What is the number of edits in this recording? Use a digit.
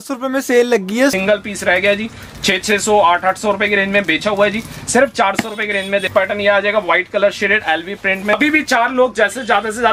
3